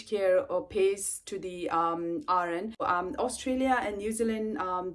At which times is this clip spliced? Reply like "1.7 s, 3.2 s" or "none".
2.9 s